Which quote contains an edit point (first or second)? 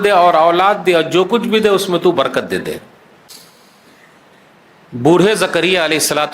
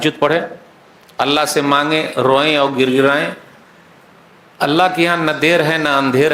first